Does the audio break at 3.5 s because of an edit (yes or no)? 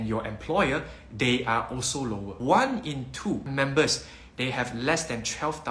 yes